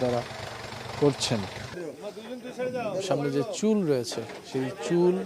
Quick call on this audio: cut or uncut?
cut